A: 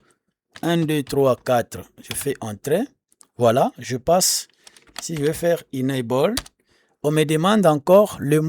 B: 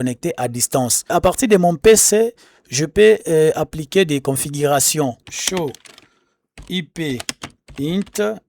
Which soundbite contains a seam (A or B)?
B